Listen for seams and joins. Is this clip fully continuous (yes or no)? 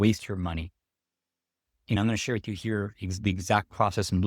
no